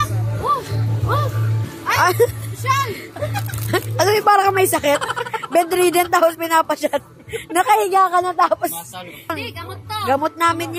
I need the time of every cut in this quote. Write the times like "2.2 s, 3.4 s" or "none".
9.3 s